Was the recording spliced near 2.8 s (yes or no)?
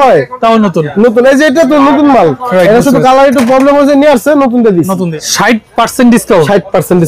no